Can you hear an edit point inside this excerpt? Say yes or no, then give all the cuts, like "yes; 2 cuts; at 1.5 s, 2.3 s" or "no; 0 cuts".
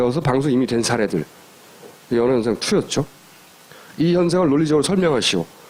no; 0 cuts